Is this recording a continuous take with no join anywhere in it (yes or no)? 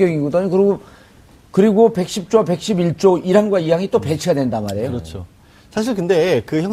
yes